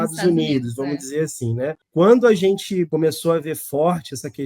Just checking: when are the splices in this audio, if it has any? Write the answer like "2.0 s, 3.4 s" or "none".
1.8 s, 2.9 s